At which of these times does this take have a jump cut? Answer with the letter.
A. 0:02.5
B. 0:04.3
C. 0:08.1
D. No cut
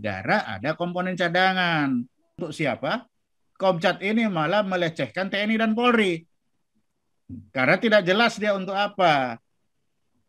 A